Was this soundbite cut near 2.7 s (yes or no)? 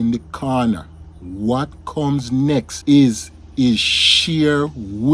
yes